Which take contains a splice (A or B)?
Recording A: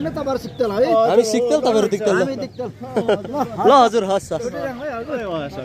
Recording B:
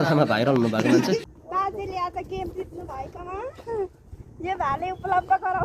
B